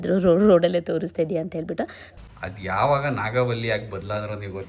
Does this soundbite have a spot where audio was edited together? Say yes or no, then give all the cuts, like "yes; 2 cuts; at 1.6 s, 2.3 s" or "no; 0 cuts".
yes; 1 cut; at 2.0 s